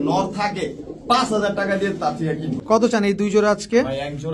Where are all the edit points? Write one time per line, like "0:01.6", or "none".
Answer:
0:02.5